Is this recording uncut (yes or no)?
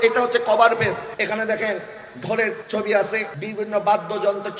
no